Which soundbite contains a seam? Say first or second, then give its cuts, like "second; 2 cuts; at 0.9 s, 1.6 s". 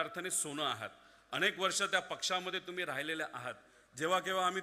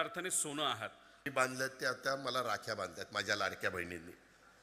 second; 1 cut; at 1.2 s